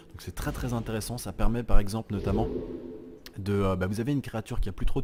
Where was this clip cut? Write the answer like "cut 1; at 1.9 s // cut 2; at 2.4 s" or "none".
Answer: none